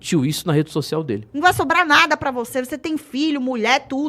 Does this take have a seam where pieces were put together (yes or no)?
yes